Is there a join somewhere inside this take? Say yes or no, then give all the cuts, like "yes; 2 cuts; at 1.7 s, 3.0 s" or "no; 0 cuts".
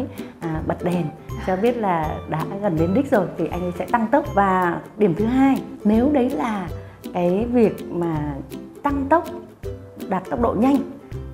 no; 0 cuts